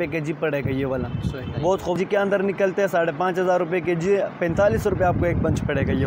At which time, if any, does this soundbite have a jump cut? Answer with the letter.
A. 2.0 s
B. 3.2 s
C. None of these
A